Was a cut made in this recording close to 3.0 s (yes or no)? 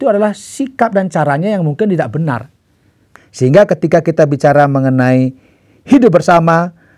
yes